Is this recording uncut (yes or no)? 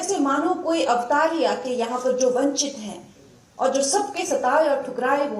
yes